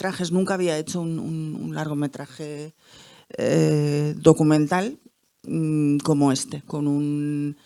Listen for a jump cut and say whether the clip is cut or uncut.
uncut